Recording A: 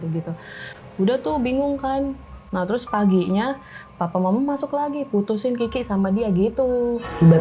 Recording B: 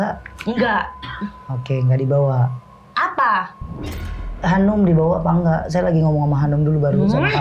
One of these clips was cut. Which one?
A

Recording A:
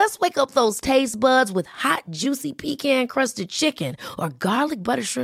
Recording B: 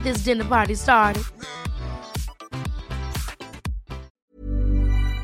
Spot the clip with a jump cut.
B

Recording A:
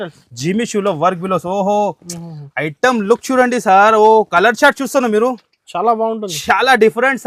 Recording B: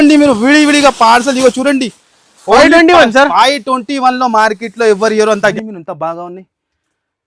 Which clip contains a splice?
B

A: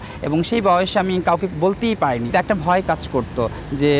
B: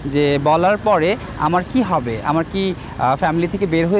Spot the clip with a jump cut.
A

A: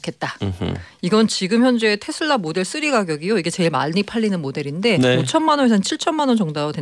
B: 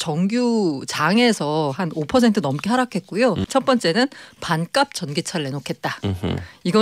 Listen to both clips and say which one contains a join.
B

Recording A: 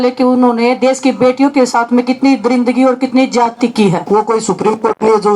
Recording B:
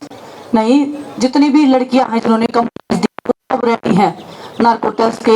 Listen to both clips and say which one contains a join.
A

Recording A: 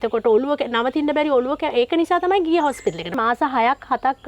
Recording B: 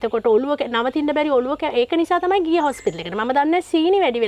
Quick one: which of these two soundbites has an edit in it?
A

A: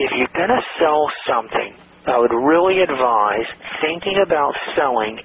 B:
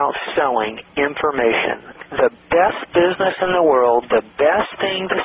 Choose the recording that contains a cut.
B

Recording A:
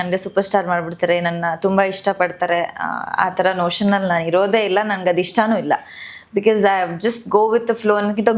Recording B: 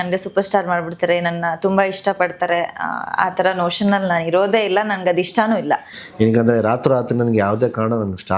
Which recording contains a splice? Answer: B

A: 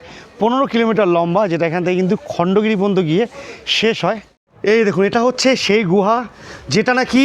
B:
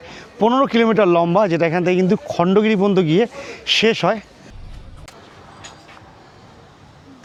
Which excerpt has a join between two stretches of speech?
A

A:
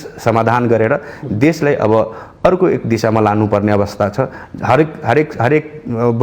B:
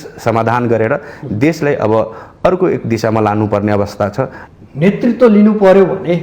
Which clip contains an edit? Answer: B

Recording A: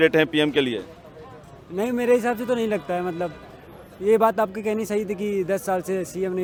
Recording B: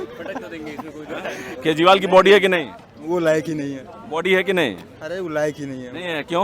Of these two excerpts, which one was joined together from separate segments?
B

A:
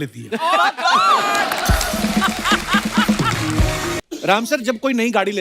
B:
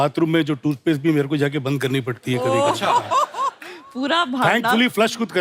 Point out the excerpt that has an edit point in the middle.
A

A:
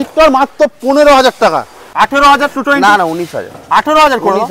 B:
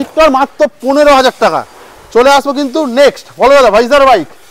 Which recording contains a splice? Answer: A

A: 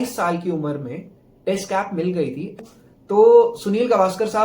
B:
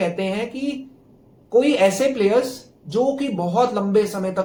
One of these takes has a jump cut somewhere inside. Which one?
A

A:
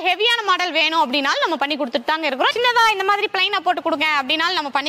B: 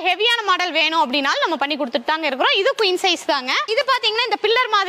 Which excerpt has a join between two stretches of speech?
A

